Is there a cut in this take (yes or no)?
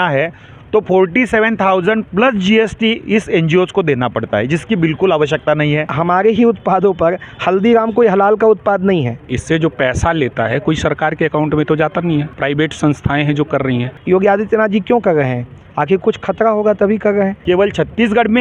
yes